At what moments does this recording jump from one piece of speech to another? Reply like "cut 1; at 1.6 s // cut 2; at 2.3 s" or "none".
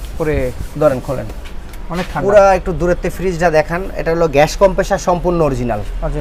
none